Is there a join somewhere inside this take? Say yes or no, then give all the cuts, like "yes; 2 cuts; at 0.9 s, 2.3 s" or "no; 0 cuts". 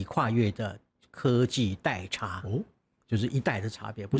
no; 0 cuts